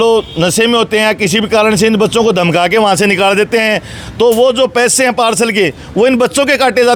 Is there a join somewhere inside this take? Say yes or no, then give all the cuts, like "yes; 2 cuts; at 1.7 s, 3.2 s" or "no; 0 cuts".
no; 0 cuts